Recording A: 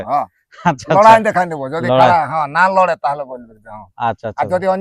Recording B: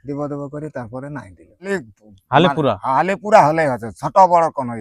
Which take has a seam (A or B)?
B